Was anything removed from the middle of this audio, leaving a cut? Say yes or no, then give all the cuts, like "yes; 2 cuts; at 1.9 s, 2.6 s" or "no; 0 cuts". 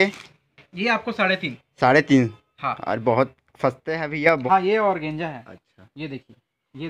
yes; 1 cut; at 4.4 s